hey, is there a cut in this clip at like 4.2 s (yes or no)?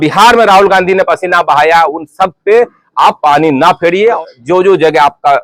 no